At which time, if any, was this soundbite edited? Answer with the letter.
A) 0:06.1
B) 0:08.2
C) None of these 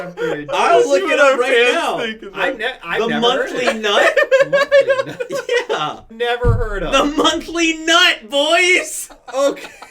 A